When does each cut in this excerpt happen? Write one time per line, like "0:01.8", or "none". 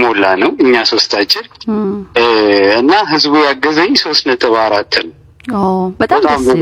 none

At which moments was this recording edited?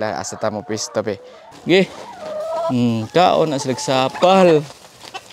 0:01.5

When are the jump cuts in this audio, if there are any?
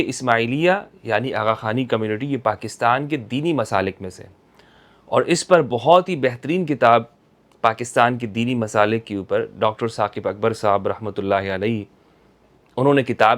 none

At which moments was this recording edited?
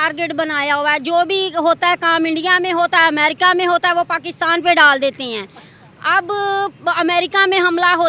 none

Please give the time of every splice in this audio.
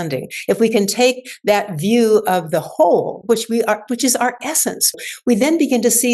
0:04.9

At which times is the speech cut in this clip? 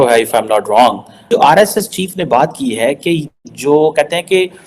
0:01.3

